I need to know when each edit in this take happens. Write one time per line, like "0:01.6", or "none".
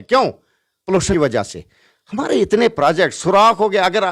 0:01.1